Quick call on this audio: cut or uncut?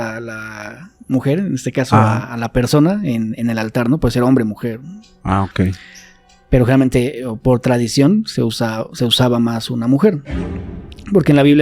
uncut